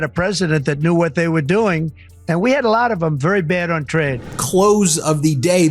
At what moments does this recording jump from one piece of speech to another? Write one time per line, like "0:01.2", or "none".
0:04.3